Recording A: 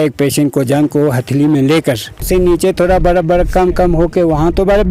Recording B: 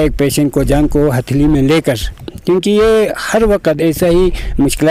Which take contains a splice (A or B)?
A